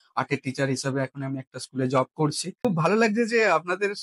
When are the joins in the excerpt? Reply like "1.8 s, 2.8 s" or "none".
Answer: 2.6 s